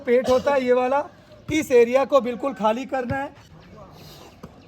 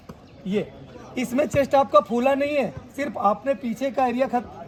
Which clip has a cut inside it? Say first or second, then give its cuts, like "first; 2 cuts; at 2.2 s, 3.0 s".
first; 1 cut; at 3.4 s